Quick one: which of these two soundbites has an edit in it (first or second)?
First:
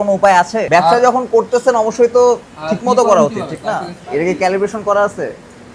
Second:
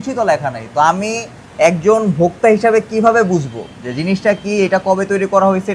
first